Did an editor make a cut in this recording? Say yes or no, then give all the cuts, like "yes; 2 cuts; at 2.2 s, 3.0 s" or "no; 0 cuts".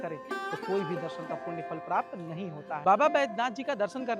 no; 0 cuts